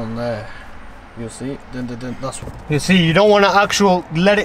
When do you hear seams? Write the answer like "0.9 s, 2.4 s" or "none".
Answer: 2.4 s